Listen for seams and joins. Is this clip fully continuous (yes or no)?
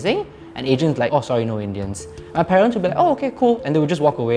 no